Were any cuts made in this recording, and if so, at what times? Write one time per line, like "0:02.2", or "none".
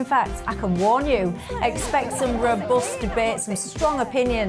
none